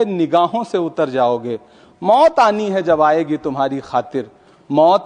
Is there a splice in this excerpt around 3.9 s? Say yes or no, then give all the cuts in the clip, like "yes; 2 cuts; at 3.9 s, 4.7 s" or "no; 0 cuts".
no; 0 cuts